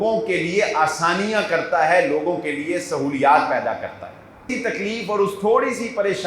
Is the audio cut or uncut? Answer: cut